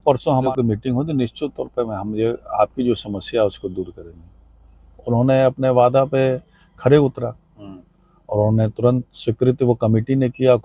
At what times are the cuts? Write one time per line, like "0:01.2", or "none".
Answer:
none